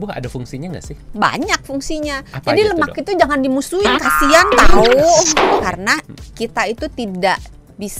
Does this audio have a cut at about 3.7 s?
no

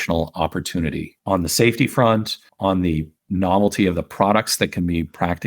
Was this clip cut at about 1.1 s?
yes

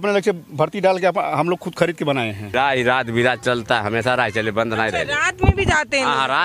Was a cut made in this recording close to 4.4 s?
no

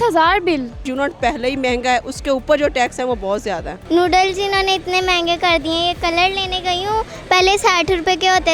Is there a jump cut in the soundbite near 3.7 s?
yes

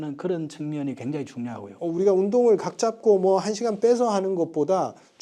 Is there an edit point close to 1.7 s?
yes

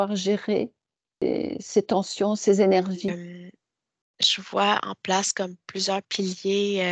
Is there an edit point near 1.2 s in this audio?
yes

